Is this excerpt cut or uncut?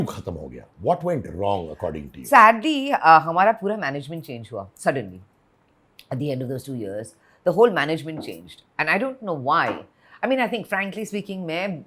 uncut